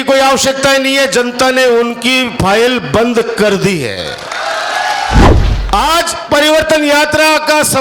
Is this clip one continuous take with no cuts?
no; 1 cut; at 5.2 s

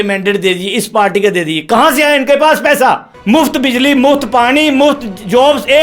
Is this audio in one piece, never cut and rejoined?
no; 1 cut; at 3.1 s

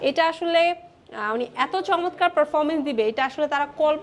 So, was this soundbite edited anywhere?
no; 0 cuts

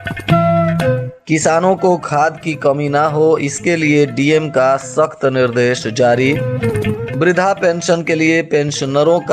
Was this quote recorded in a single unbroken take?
no; 1 cut; at 1.1 s

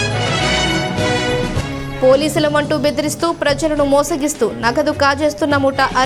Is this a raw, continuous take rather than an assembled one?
yes; 0 cuts

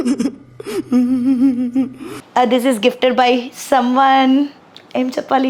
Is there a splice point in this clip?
yes; 1 cut; at 2.0 s

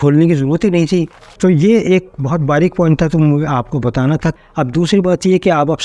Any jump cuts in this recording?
yes; 2 cuts; at 1.2 s, 4.3 s

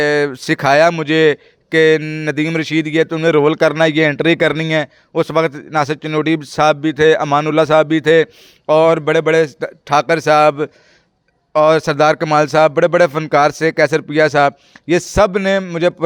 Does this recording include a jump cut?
no; 0 cuts

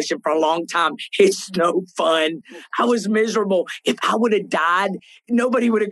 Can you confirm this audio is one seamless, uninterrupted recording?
yes; 0 cuts

